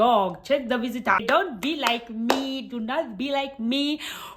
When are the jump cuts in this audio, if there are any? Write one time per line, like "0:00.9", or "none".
0:01.2

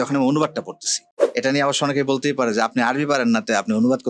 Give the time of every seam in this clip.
0:01.2

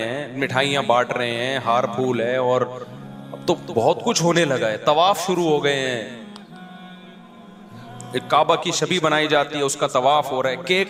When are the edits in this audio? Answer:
none

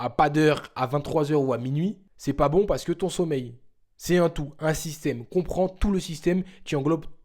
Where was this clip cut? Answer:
0:02.1

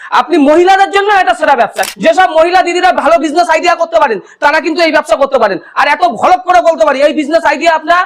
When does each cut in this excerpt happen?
0:01.8

